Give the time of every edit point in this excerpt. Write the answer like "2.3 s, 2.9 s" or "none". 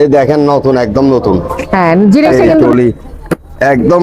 2.4 s